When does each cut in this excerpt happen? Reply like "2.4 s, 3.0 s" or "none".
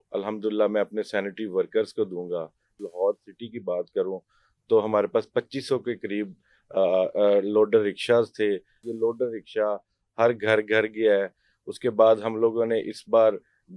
2.8 s, 8.8 s